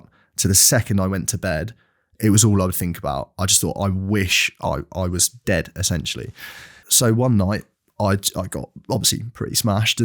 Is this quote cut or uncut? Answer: cut